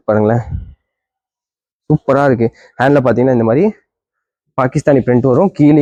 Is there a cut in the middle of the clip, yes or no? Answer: no